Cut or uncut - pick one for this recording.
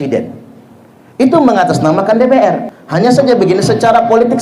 cut